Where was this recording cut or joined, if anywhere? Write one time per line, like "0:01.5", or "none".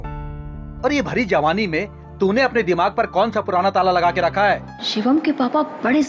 0:04.8